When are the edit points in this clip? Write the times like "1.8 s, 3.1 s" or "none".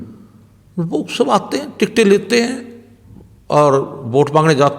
none